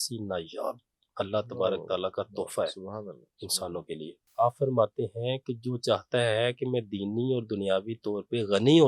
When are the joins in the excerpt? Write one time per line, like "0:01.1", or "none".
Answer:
0:04.2